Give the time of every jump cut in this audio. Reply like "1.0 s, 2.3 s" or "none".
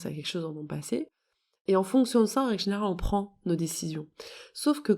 none